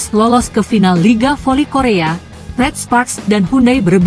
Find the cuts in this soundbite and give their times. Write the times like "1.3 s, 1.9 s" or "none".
none